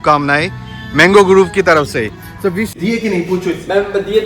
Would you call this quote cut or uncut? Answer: cut